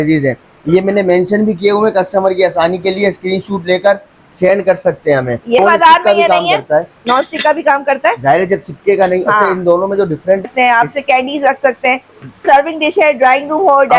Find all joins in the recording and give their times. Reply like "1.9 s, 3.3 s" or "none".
5.6 s, 10.5 s